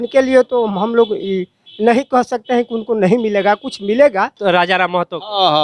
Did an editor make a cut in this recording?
yes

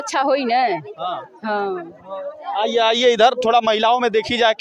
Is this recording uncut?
yes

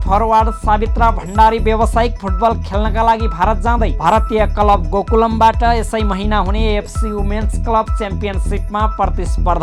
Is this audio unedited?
yes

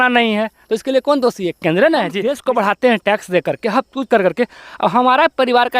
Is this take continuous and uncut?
no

